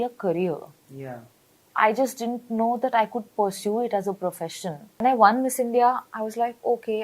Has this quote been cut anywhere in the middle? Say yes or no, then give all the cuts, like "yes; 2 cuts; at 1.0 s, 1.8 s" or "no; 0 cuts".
yes; 1 cut; at 4.9 s